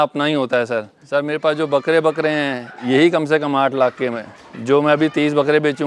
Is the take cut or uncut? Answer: cut